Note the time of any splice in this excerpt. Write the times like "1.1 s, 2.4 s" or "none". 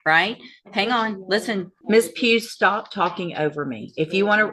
1.7 s